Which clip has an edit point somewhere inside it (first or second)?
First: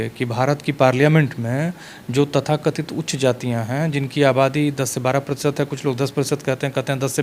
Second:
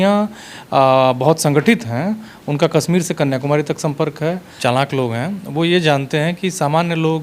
second